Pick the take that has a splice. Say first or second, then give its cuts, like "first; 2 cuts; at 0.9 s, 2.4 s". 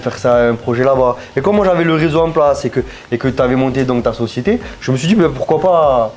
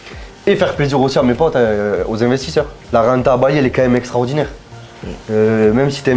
second; 1 cut; at 2.8 s